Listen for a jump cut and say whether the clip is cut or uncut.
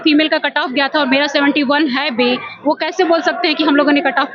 uncut